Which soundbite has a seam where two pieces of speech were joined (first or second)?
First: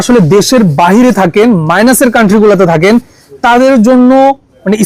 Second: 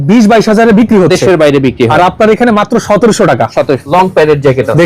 second